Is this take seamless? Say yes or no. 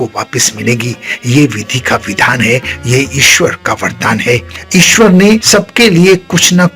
no